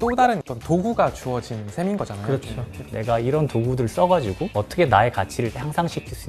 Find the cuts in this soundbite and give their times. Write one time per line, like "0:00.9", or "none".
0:02.8